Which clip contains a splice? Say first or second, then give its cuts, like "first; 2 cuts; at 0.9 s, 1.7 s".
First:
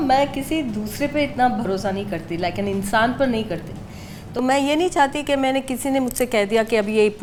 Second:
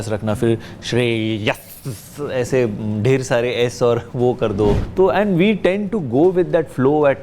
second; 1 cut; at 4.8 s